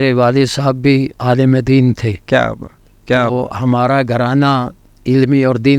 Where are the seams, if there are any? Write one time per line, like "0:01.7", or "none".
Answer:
none